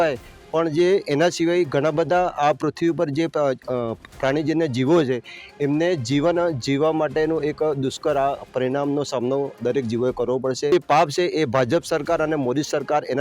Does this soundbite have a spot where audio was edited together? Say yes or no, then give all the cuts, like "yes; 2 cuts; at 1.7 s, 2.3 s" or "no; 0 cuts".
yes; 1 cut; at 10.7 s